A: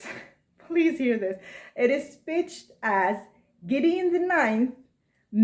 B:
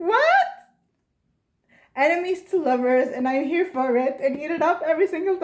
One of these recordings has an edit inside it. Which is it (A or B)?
B